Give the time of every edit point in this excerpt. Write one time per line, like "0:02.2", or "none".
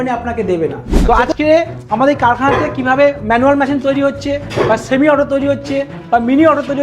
0:01.0